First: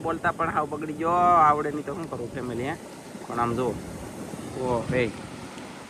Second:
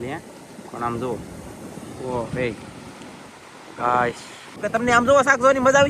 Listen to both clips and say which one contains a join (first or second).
second